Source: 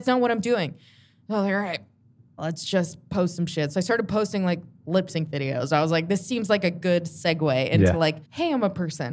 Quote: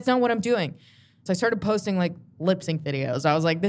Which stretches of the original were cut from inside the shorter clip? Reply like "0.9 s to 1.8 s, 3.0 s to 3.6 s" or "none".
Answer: 1.2 s to 3.7 s